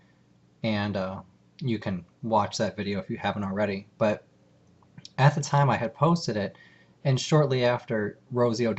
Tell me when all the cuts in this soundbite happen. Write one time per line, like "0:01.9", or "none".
0:00.9